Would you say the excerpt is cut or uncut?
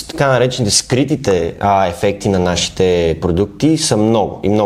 uncut